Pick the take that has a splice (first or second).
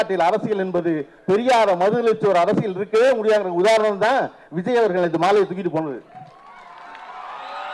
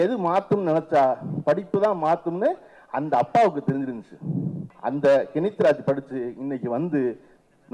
second